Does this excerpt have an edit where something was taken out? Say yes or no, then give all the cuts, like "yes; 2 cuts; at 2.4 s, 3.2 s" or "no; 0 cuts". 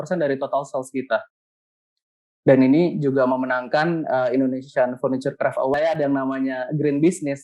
yes; 1 cut; at 5.7 s